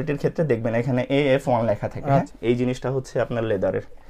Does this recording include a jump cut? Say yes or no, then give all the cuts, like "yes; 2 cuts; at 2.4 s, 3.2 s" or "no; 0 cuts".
no; 0 cuts